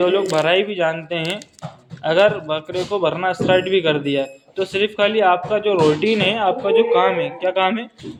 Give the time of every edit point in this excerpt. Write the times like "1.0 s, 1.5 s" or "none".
none